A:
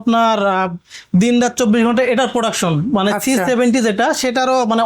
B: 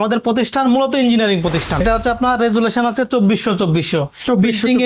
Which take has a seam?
B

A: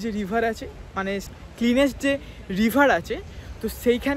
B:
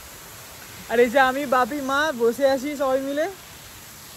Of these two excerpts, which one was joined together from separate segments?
A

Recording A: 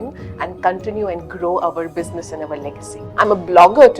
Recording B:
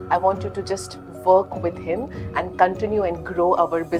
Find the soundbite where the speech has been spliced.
A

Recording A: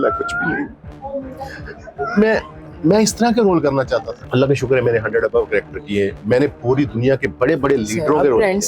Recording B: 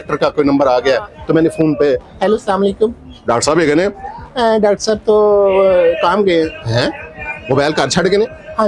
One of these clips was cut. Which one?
A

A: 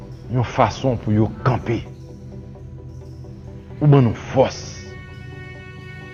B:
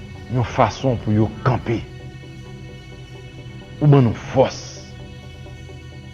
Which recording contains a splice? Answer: B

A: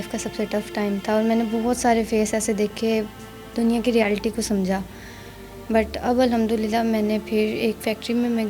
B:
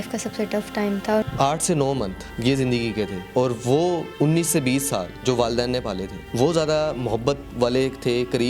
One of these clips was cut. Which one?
B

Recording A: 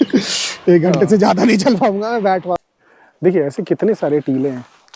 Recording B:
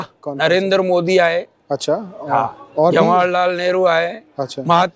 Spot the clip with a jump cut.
A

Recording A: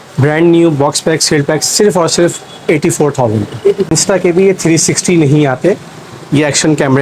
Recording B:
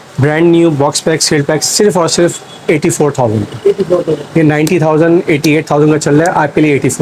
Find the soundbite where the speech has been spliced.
A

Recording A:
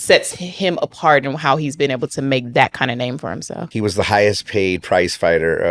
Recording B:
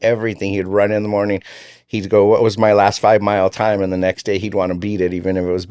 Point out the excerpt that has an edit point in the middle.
A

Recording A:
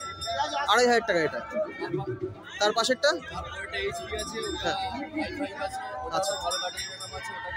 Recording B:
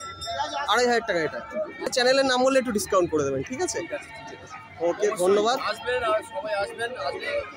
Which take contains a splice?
B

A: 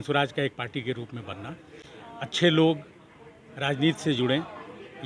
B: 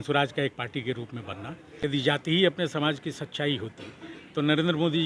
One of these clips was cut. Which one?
B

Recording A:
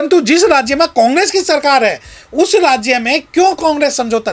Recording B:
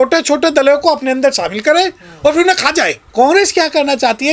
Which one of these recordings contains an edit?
B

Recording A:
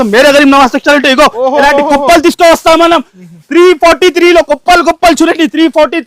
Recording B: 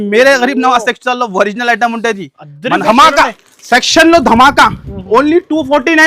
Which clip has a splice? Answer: B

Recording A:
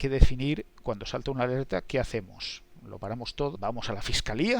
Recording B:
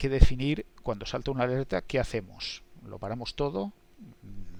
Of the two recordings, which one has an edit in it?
A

